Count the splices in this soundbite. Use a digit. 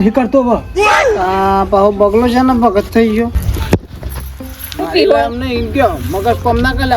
1